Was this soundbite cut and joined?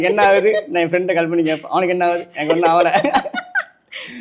no; 0 cuts

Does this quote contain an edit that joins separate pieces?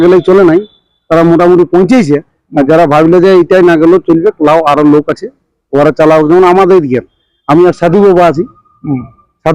no; 0 cuts

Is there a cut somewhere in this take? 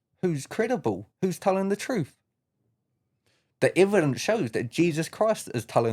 no; 0 cuts

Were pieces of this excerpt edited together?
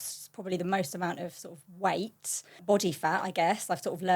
yes; 1 cut; at 2.6 s

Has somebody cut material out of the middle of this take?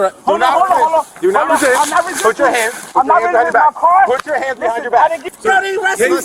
yes; 1 cut; at 5.3 s

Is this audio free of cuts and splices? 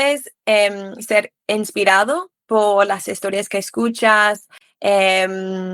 yes; 0 cuts

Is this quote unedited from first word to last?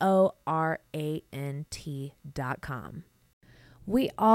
no; 1 cut; at 3.4 s

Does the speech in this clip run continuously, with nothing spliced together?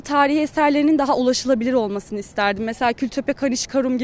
yes; 0 cuts

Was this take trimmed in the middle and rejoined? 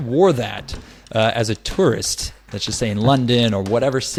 no; 0 cuts

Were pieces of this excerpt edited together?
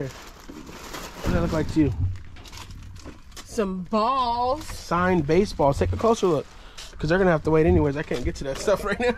no; 0 cuts

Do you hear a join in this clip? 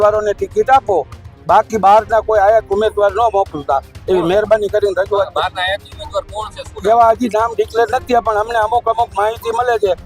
no; 0 cuts

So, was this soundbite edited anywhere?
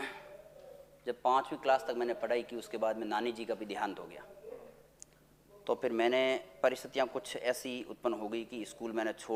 no; 0 cuts

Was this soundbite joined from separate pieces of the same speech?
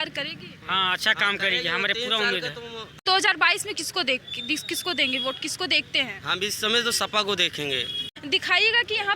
yes; 2 cuts; at 3.0 s, 8.1 s

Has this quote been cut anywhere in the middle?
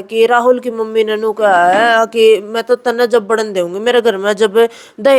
no; 0 cuts

